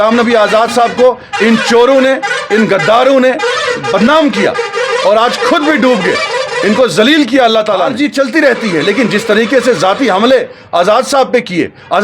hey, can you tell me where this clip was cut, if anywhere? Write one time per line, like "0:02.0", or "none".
0:07.9